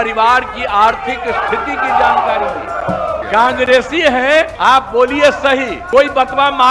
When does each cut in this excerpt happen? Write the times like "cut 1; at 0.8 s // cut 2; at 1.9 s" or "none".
cut 1; at 3.2 s // cut 2; at 4.5 s // cut 3; at 5.8 s